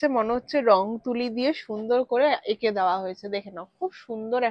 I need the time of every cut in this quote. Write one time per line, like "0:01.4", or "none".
none